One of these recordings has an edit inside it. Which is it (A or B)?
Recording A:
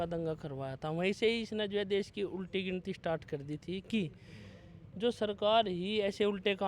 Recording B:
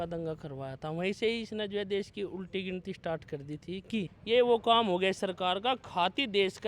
B